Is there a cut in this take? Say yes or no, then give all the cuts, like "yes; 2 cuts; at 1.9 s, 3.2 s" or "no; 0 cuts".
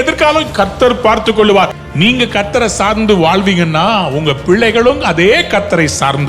yes; 1 cut; at 1.8 s